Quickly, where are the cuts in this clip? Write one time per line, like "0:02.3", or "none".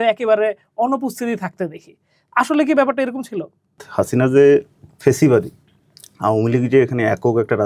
0:03.8

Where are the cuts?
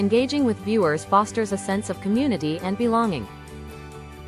0:03.3

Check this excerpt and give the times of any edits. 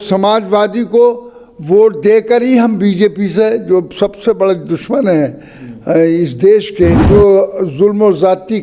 0:07.0

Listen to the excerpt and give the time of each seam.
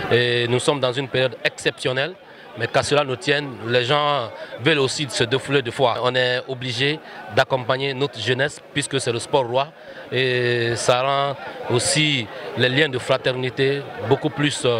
0:06.0

